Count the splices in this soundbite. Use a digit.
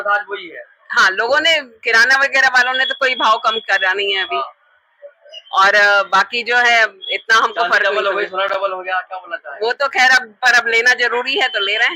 0